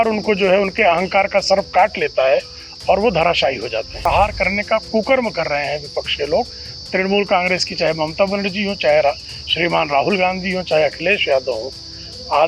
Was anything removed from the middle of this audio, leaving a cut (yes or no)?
yes